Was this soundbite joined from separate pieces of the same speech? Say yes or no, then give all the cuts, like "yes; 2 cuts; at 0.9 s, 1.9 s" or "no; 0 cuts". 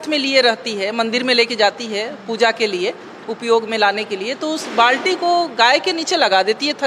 no; 0 cuts